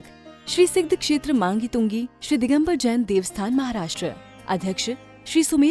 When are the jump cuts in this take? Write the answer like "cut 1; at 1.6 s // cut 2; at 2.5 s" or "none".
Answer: none